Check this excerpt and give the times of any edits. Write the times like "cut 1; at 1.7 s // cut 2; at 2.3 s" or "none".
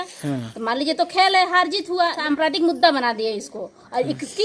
cut 1; at 2.2 s